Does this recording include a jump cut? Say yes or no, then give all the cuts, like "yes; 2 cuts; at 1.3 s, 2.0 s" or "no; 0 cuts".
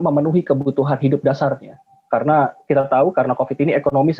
no; 0 cuts